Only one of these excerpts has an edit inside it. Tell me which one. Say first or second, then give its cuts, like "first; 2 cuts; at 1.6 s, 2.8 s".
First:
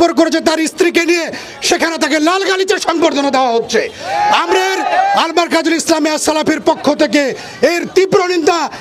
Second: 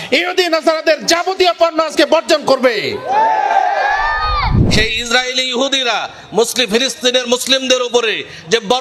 second; 1 cut; at 4.6 s